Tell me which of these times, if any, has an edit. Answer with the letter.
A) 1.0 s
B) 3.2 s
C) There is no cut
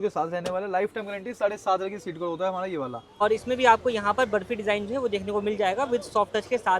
B